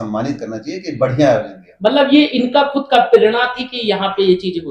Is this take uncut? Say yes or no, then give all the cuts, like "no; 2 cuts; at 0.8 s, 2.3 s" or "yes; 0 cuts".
yes; 0 cuts